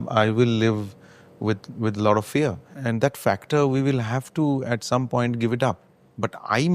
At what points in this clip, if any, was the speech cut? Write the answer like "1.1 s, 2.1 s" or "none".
none